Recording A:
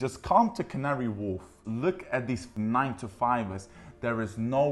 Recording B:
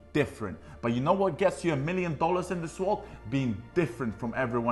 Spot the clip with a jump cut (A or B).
A